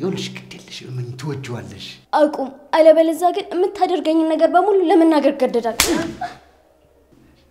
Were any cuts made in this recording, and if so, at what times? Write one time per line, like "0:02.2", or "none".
none